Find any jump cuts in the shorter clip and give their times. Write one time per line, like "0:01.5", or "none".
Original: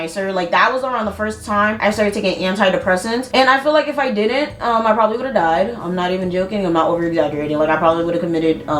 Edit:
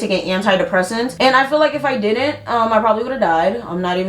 none